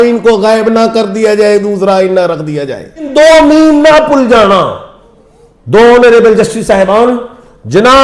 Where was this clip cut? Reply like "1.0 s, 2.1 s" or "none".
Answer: 3.1 s